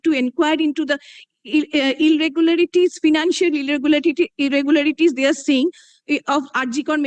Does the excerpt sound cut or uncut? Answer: uncut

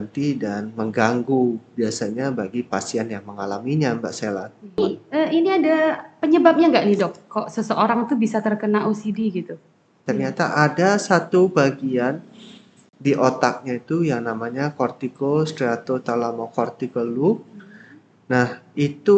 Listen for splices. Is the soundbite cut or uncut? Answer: cut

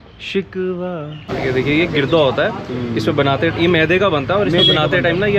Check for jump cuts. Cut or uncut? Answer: cut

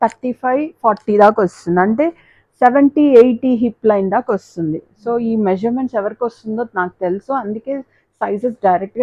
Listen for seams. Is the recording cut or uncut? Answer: uncut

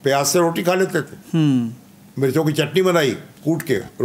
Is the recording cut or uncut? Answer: cut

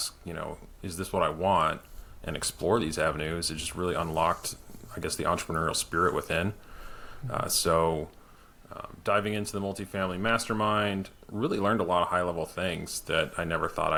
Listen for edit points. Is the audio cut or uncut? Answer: uncut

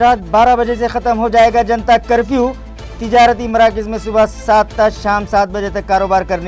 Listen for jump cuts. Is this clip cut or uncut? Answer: uncut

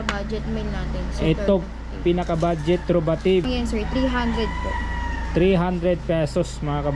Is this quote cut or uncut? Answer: uncut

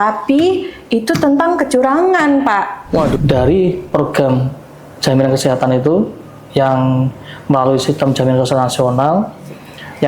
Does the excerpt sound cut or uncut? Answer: cut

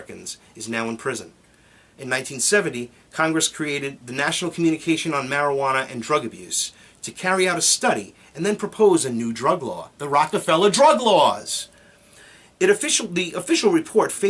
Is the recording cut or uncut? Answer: cut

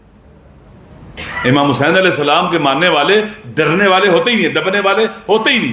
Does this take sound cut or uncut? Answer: uncut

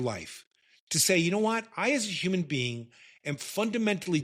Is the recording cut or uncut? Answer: uncut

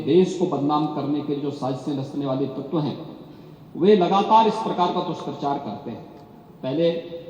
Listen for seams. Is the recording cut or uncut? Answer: uncut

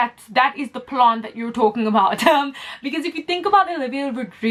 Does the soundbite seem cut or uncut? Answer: uncut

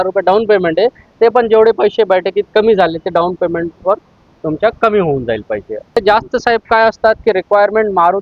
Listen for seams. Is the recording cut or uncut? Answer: cut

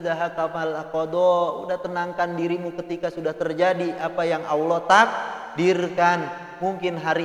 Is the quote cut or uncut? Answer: uncut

